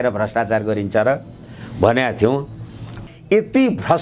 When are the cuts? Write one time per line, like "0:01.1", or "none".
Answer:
0:02.9